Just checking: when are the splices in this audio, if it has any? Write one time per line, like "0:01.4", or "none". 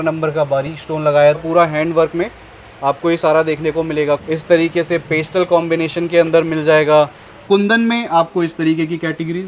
0:01.4
0:04.2
0:07.4